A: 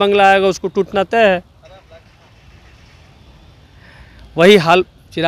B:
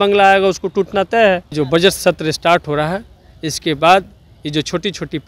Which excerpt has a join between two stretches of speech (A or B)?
B